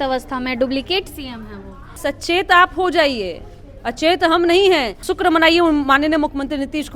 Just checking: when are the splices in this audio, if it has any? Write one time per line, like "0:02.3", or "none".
0:02.0
0:05.0